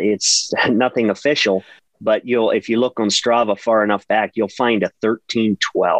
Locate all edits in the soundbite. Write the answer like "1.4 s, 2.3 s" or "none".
1.8 s

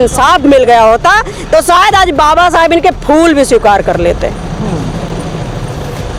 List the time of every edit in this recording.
none

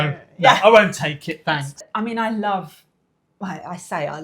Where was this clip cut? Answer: 1.9 s

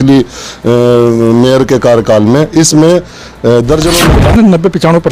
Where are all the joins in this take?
3.9 s

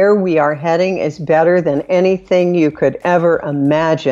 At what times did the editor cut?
none

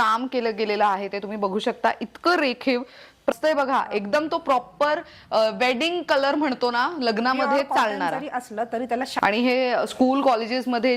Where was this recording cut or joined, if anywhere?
3.3 s, 9.1 s

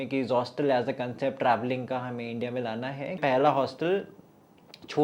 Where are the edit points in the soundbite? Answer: 3.2 s

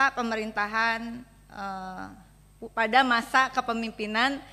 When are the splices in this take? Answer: none

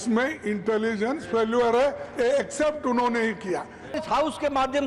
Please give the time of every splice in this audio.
4.0 s

